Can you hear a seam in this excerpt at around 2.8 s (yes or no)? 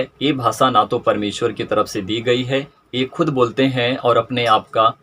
yes